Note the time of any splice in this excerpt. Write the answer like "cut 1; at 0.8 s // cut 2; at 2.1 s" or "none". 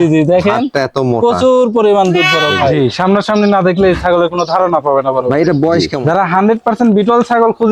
cut 1; at 2.7 s // cut 2; at 5.9 s